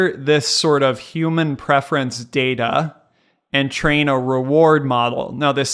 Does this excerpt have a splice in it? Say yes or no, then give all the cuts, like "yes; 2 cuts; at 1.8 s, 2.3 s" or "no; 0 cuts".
no; 0 cuts